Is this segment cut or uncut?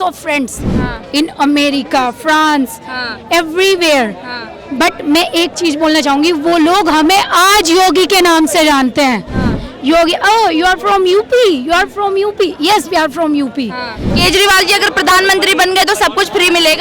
cut